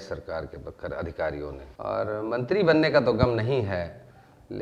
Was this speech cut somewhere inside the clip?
yes; 1 cut; at 1.6 s

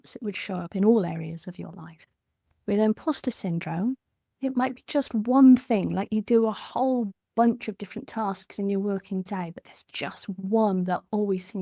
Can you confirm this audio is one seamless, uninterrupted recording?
yes; 0 cuts

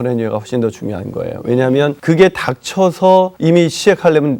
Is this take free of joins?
no; 2 cuts; at 2.0 s, 3.3 s

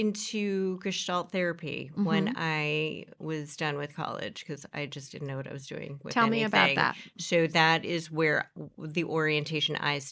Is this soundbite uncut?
yes; 0 cuts

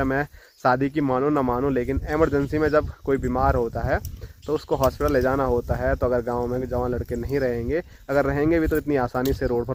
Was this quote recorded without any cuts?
yes; 0 cuts

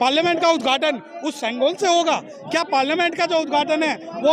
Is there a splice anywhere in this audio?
no; 0 cuts

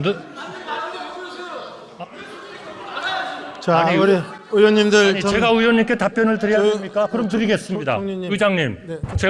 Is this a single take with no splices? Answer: yes; 0 cuts

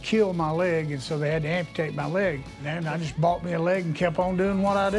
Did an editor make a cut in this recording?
yes; 1 cut; at 2.5 s

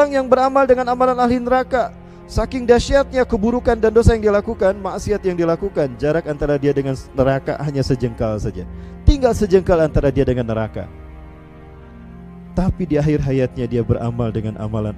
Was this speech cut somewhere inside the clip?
no; 0 cuts

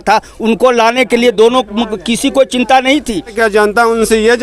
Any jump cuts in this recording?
yes; 1 cut; at 3.3 s

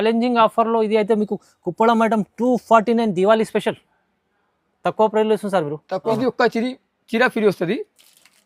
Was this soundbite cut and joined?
yes; 1 cut; at 6.1 s

